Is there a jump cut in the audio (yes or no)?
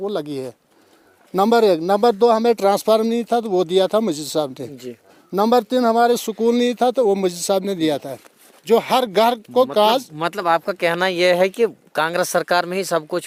no